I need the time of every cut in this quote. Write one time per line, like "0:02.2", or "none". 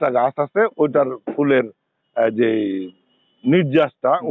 none